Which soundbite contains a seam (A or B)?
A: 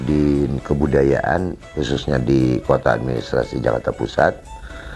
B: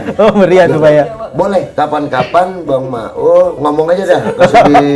B